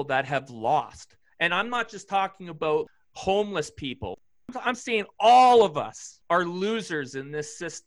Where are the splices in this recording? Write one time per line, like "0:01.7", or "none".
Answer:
0:02.9
0:04.2
0:06.1